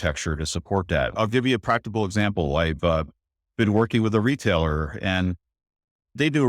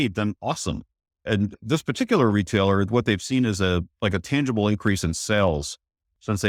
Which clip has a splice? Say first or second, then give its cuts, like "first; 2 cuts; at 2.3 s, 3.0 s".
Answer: first; 1 cut; at 1.1 s